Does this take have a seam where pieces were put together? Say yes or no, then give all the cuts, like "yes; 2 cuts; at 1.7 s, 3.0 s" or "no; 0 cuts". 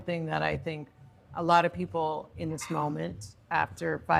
no; 0 cuts